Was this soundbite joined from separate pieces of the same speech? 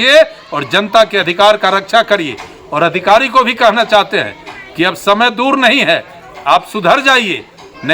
no; 0 cuts

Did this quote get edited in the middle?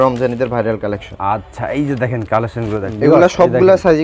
yes; 1 cut; at 2.9 s

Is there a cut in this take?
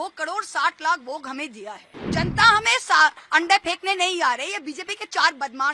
yes; 1 cut; at 2.1 s

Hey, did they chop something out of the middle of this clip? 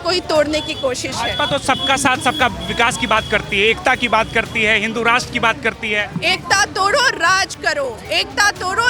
no; 0 cuts

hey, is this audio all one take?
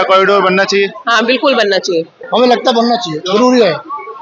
no; 1 cut; at 2.2 s

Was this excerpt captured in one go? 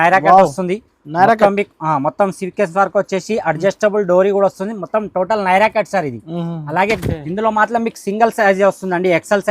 no; 1 cut; at 6.9 s

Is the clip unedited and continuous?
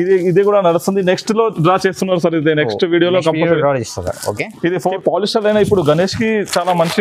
no; 1 cut; at 5.0 s

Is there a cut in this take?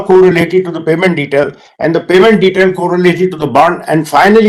no; 0 cuts

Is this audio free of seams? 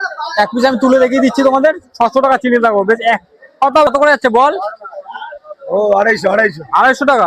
no; 1 cut; at 3.9 s

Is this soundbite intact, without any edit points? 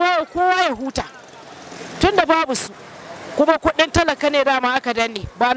yes; 0 cuts

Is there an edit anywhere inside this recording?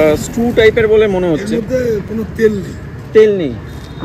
no; 0 cuts

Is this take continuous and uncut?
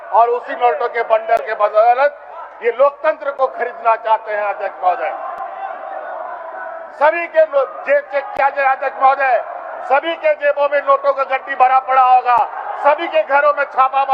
yes; 0 cuts

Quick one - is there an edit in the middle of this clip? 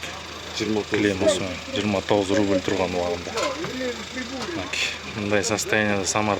no; 0 cuts

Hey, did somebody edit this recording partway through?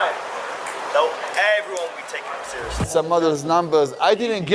yes; 1 cut; at 2.9 s

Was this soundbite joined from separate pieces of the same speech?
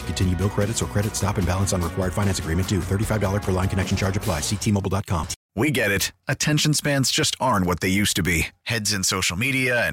yes; 1 cut; at 5.4 s

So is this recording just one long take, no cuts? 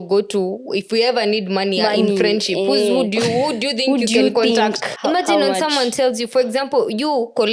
no; 1 cut; at 4.9 s

